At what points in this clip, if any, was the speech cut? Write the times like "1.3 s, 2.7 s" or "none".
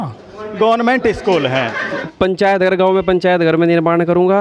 2.1 s